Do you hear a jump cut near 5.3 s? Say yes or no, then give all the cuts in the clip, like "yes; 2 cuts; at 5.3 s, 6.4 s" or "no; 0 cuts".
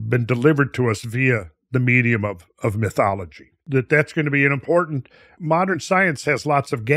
yes; 2 cuts; at 3.6 s, 5.3 s